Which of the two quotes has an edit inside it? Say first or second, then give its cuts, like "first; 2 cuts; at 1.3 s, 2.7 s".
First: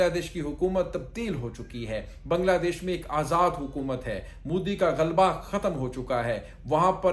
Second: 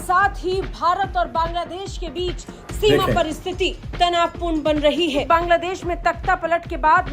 second; 1 cut; at 5.2 s